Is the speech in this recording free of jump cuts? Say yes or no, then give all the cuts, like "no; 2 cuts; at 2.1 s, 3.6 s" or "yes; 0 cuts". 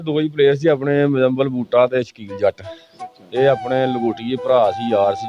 yes; 0 cuts